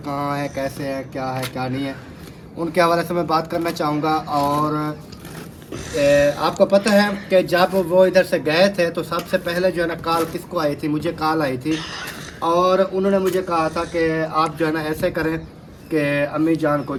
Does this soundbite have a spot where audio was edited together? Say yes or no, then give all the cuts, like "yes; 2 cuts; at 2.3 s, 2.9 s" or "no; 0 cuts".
no; 0 cuts